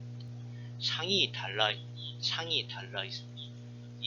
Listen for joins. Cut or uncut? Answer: cut